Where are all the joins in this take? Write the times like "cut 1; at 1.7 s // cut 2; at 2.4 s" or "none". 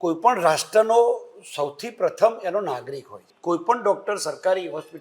cut 1; at 3.3 s